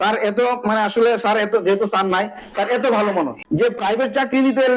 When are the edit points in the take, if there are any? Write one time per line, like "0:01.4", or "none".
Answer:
0:03.4